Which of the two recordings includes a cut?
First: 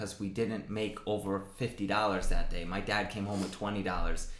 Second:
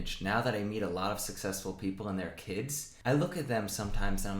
second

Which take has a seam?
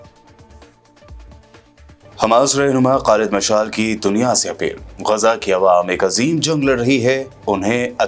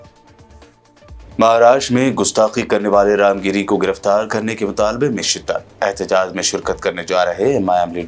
second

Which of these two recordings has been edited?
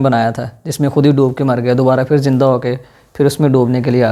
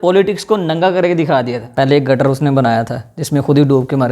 second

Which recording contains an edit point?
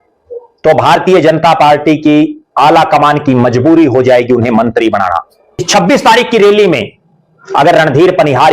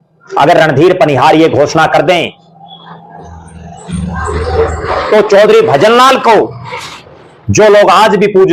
first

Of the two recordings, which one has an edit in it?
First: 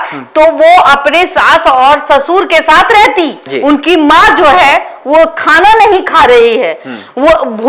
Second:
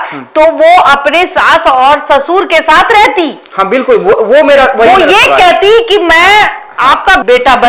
first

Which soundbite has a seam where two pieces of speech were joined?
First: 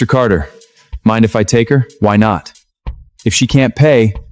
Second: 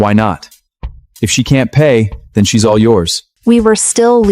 second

